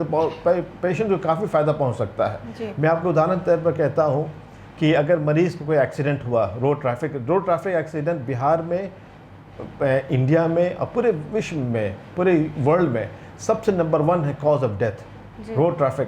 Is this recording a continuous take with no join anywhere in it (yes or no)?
yes